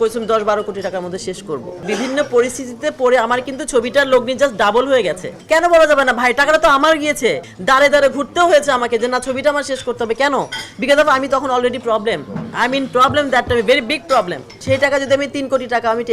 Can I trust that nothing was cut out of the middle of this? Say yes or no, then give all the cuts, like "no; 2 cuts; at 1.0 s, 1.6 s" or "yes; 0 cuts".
no; 4 cuts; at 1.8 s, 5.3 s, 7.5 s, 14.5 s